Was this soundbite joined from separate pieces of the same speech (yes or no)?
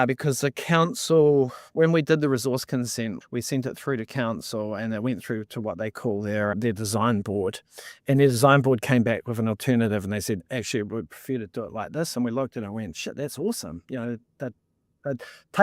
yes